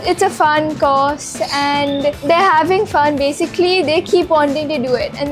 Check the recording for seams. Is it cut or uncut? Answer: uncut